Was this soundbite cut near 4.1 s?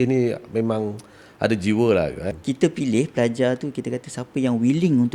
no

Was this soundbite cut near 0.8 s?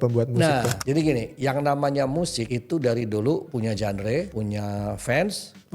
yes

